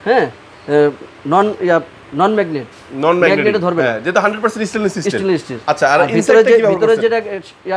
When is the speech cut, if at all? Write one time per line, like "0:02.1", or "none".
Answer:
none